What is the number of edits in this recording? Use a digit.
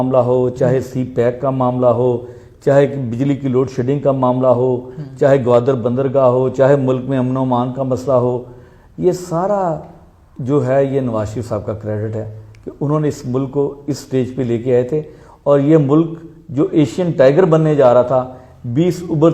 0